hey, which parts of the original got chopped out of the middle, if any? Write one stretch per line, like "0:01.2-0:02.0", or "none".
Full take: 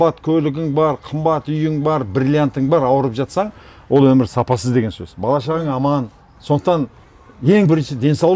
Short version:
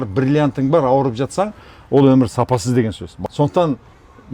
0:05.1-0:06.2

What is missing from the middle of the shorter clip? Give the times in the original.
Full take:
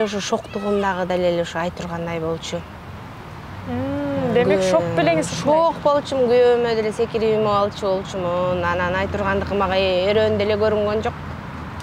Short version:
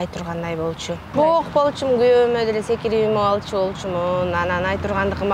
0:02.7-0:05.3

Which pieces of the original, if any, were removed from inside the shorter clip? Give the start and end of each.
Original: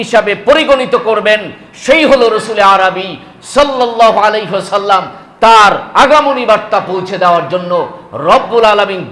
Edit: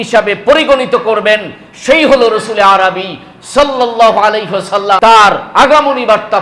0:05.0-0:05.4

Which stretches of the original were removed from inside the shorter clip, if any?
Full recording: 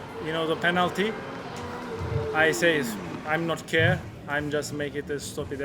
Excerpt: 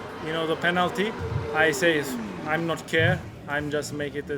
0:01.5-0:02.3

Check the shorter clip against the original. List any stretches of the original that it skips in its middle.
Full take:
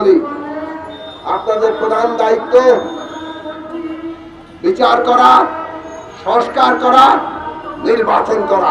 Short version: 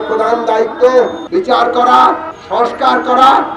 0:02.9-0:04.5
0:05.6-0:06.1

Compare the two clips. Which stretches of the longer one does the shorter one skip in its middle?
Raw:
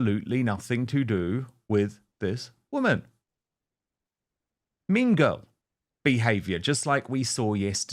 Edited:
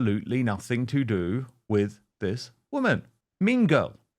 0:03.2-0:04.7

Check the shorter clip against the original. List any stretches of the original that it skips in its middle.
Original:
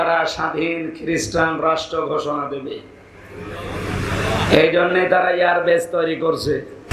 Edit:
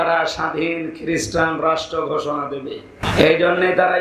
0:03.0-0:04.4

